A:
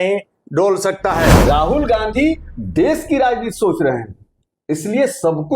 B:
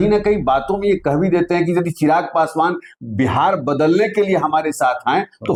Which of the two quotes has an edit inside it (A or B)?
A